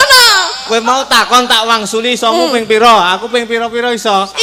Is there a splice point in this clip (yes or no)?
no